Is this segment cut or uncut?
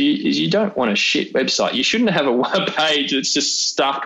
uncut